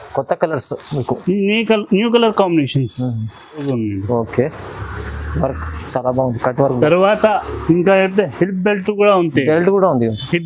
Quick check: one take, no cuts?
no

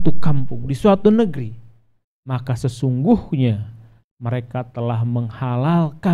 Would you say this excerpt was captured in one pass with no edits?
yes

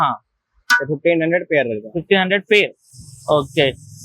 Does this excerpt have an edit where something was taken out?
no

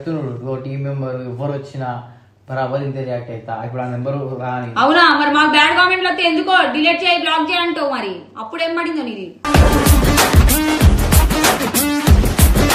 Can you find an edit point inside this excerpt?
no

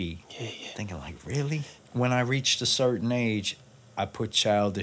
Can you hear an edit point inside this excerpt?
yes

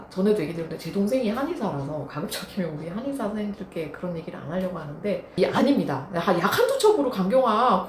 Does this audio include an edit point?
yes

